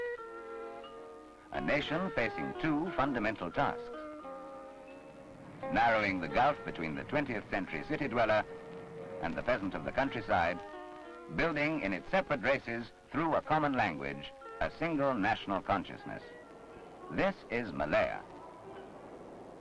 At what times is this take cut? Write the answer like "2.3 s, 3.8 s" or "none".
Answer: none